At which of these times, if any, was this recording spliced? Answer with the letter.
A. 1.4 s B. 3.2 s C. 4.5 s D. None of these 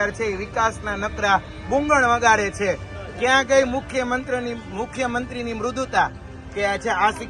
D